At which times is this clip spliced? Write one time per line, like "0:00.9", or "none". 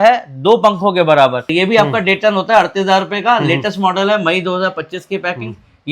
0:01.5